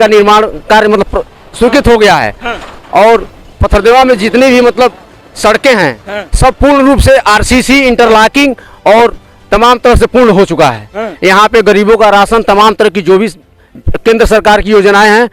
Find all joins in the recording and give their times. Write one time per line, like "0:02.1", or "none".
none